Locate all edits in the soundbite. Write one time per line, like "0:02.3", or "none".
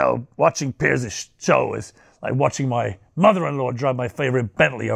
none